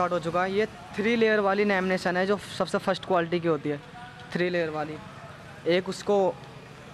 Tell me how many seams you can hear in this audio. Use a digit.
0